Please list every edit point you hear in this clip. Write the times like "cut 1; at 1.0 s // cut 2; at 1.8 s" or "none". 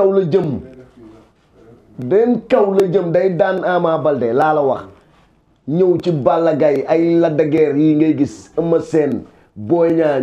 none